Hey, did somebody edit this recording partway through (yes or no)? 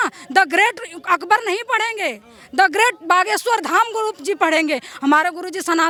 no